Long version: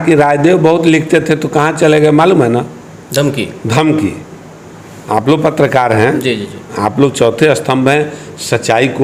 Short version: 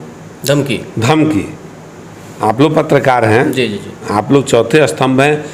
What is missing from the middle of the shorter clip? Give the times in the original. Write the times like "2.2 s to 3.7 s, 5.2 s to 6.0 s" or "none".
none